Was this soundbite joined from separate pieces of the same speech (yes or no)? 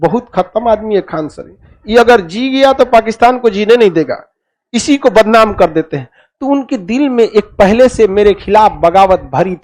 no